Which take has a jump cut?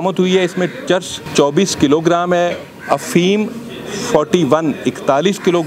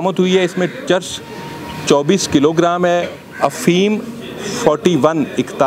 first; 1 cut; at 1.2 s

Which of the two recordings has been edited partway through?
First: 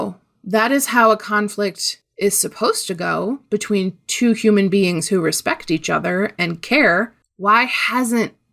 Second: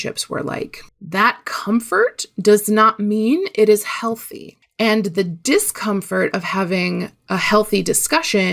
first; 1 cut; at 7.2 s

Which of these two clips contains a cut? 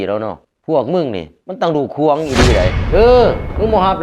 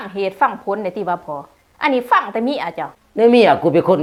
first; 1 cut; at 2.8 s

